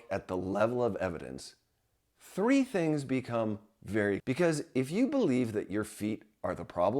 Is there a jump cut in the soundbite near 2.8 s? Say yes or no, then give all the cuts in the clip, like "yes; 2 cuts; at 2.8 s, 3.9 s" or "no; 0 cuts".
no; 1 cut; at 4.2 s